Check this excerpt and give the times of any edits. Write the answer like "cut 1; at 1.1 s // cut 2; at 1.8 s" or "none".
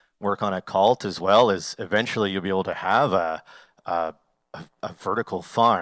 none

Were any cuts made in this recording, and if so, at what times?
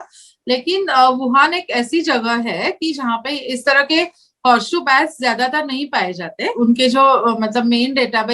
cut 1; at 6.4 s

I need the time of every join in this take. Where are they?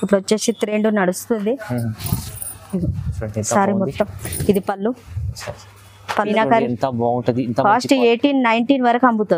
cut 1; at 6.3 s

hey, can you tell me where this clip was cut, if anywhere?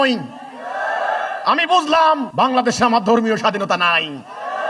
cut 1; at 2.3 s

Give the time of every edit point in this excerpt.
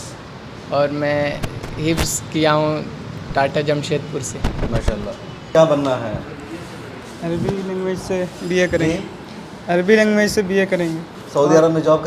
cut 1; at 5.5 s // cut 2; at 11.2 s

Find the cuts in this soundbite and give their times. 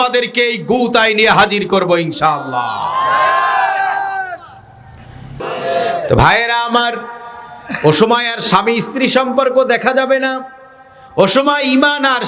cut 1; at 5.3 s

